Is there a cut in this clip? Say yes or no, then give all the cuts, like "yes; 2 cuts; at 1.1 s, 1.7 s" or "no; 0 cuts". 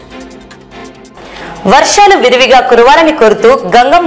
yes; 1 cut; at 1.1 s